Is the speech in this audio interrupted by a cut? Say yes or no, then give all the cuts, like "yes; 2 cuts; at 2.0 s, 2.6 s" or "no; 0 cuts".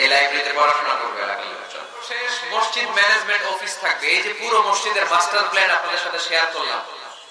yes; 1 cut; at 2.3 s